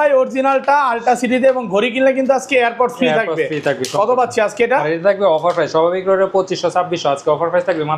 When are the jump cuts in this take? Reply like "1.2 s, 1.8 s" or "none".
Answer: none